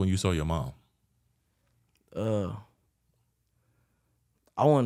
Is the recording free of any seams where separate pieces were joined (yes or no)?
yes